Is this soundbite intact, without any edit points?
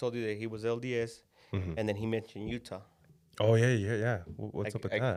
yes; 0 cuts

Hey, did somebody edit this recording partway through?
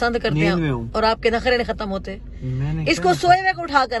no; 0 cuts

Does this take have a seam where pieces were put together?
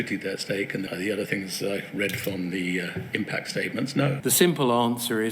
yes; 2 cuts; at 0.9 s, 4.2 s

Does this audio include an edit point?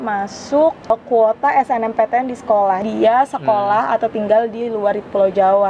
yes; 1 cut; at 2.8 s

